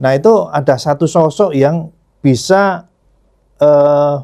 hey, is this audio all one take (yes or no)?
yes